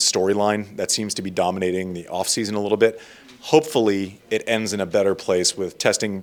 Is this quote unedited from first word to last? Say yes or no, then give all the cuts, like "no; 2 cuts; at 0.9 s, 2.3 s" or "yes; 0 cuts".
yes; 0 cuts